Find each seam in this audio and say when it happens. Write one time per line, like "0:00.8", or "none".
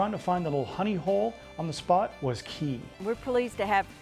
0:02.7